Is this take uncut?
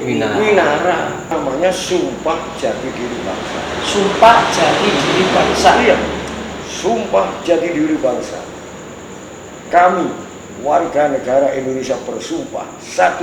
no; 1 cut; at 1.3 s

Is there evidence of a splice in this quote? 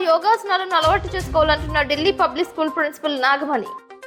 no; 0 cuts

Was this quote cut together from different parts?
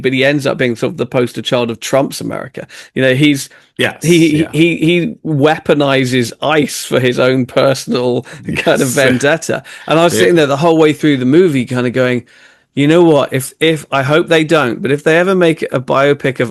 no; 0 cuts

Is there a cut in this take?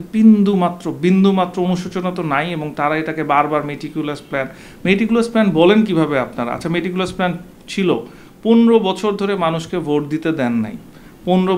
no; 0 cuts

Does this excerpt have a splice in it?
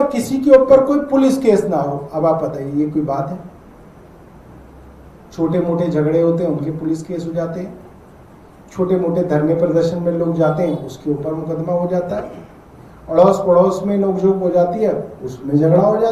no; 0 cuts

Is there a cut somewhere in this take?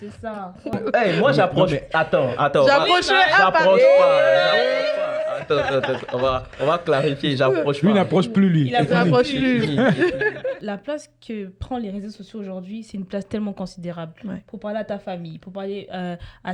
yes; 2 cuts; at 0.8 s, 10.6 s

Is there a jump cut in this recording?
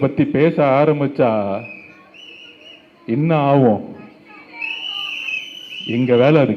no; 0 cuts

